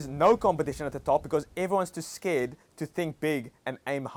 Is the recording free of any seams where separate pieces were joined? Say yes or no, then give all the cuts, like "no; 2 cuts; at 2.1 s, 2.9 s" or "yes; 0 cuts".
yes; 0 cuts